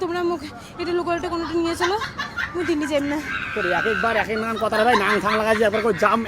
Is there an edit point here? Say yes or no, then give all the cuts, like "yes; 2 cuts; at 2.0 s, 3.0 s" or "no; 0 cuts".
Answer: no; 0 cuts